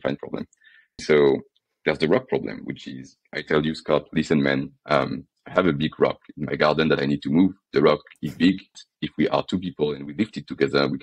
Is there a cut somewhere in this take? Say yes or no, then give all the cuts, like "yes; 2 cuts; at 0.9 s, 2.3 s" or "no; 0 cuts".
yes; 2 cuts; at 1.0 s, 8.8 s